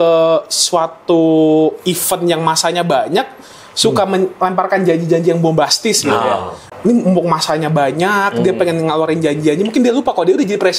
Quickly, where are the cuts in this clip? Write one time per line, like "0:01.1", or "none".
0:06.6